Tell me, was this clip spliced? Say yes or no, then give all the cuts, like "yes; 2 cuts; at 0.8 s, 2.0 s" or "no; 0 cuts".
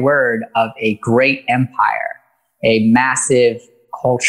no; 0 cuts